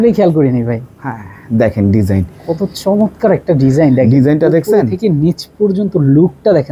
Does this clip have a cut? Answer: no; 0 cuts

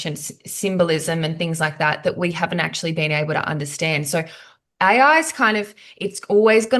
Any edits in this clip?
no; 0 cuts

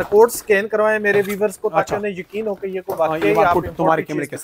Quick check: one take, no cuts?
yes; 0 cuts

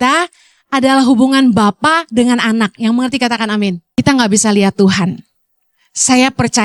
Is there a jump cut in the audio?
yes; 1 cut; at 3.8 s

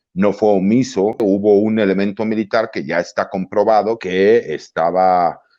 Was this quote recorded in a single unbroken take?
no; 2 cuts; at 1.2 s, 4.0 s

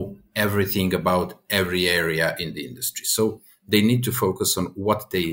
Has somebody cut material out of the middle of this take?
no; 0 cuts

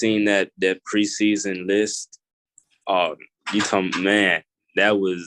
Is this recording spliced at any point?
no; 0 cuts

